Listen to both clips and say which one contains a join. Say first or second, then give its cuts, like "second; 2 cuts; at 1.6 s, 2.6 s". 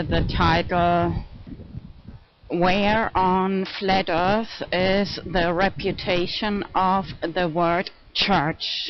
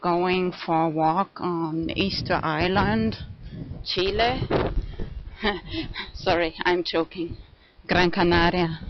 first; 1 cut; at 7.1 s